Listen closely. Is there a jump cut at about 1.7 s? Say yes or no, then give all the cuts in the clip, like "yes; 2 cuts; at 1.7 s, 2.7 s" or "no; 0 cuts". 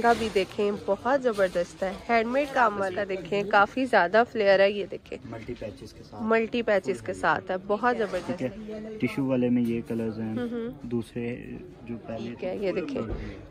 no; 3 cuts; at 3.0 s, 8.2 s, 12.4 s